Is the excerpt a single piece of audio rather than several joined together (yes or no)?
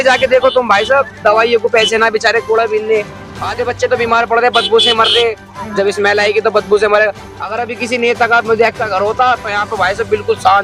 yes